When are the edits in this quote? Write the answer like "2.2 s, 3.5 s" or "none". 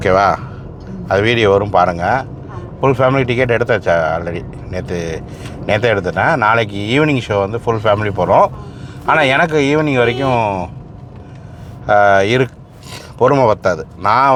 none